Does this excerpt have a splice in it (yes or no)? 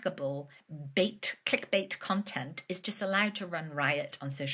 no